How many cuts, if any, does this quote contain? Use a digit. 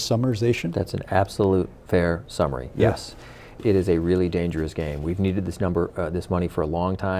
1